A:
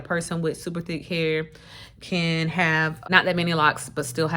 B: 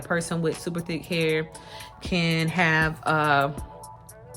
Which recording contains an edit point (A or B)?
A